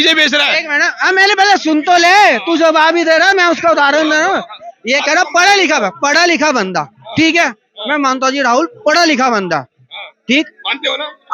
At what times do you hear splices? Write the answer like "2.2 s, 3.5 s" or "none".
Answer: none